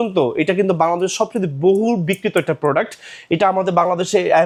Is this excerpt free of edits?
yes; 0 cuts

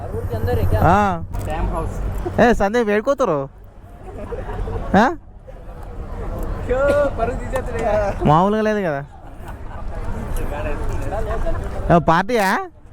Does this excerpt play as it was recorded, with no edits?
no; 1 cut; at 1.3 s

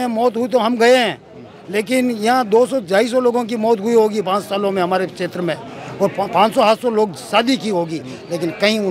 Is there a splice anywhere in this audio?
no; 0 cuts

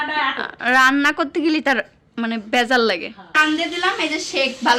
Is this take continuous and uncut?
no; 1 cut; at 3.4 s

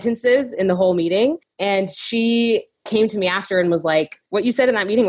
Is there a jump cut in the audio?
no; 0 cuts

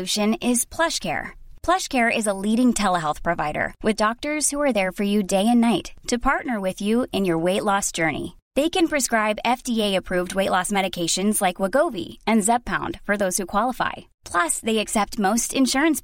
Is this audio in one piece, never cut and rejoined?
yes; 0 cuts

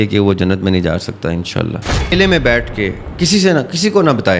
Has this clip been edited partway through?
yes; 1 cut; at 2.1 s

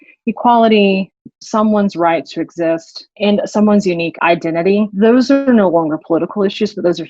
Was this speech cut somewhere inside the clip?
yes; 3 cuts; at 1.3 s, 3.1 s, 4.3 s

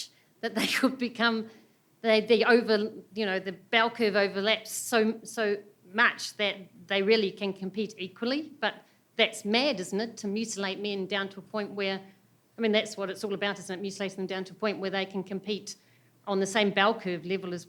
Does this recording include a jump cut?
no; 0 cuts

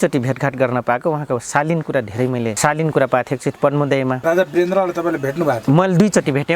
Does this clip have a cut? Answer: yes; 2 cuts; at 2.6 s, 4.2 s

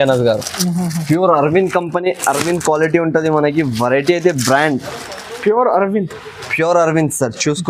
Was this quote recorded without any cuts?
yes; 0 cuts

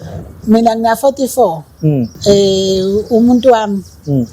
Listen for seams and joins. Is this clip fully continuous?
no; 1 cut; at 2.1 s

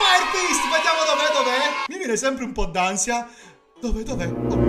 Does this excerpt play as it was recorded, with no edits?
no; 1 cut; at 1.9 s

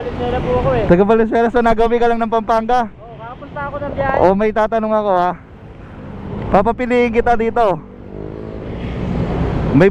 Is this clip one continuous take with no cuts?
yes; 0 cuts

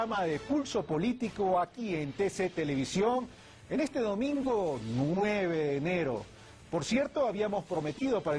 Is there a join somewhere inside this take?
no; 0 cuts

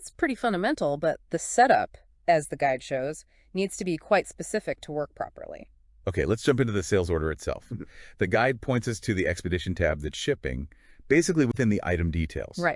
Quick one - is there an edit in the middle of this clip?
yes; 1 cut; at 11.8 s

